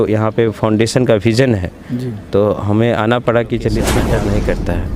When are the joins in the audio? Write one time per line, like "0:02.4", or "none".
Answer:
0:04.0